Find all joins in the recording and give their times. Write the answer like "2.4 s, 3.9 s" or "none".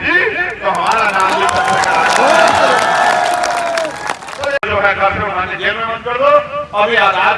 4.6 s

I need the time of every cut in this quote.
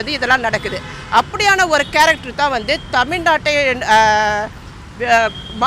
none

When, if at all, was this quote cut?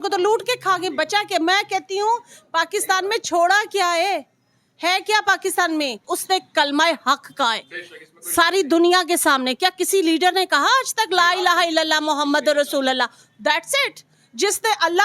6.0 s

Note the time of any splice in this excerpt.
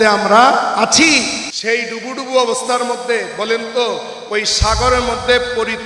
1.5 s

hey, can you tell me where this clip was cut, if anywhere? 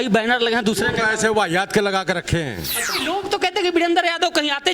2.9 s

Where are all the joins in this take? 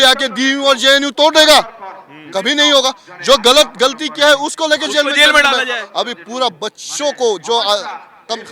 none

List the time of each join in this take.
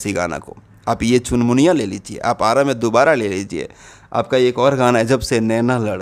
none

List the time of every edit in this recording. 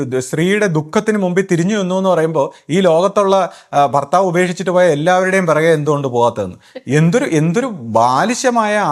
none

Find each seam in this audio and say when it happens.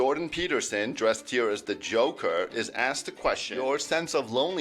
3.5 s

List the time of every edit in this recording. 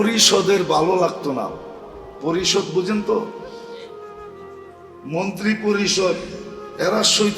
3.3 s, 5.0 s

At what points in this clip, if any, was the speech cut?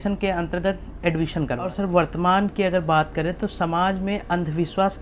1.7 s

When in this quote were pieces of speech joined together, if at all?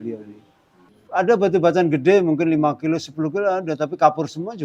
0.9 s

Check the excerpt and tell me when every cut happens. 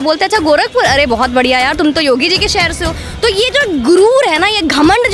none

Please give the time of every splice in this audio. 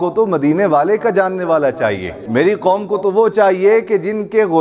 2.1 s

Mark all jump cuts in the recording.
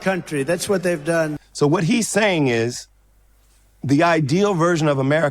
1.3 s

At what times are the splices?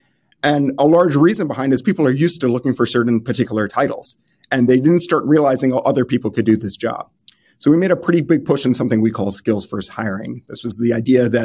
none

